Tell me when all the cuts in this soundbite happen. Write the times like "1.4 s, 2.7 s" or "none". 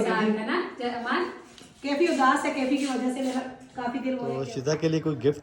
4.4 s